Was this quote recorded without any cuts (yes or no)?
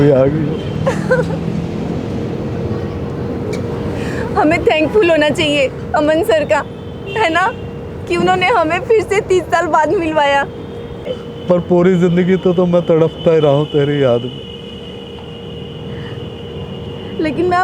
no